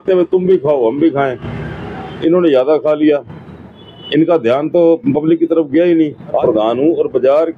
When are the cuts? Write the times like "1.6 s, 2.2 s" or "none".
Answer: 6.4 s

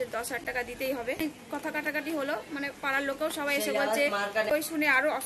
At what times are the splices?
1.2 s, 4.5 s

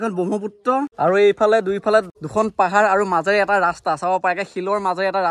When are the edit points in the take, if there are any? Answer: 0.9 s, 2.2 s

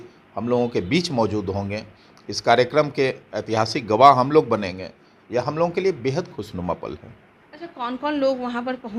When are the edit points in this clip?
none

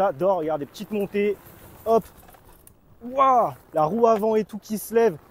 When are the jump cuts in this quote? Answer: 3.6 s

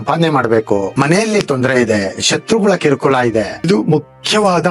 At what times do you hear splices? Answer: 0.9 s, 3.7 s

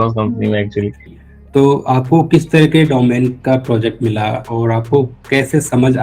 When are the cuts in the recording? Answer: 1.1 s

